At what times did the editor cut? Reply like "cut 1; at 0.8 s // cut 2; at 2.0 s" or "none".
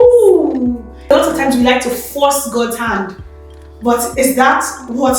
cut 1; at 1.1 s